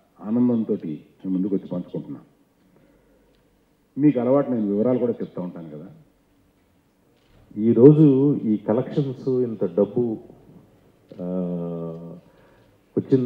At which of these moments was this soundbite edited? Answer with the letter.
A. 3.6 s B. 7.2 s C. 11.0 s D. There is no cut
B